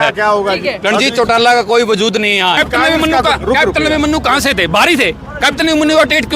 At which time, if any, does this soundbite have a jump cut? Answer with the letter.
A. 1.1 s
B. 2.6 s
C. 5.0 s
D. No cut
B